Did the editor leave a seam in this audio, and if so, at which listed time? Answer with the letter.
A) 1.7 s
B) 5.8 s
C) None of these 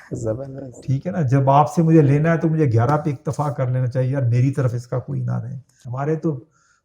B